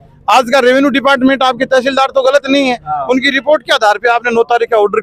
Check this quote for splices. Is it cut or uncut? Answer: uncut